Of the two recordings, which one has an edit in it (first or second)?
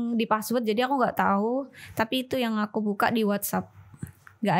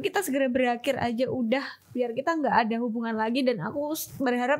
second